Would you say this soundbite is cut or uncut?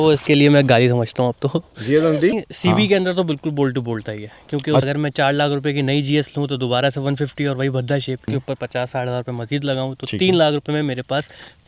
cut